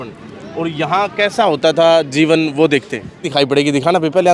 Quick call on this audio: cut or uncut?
cut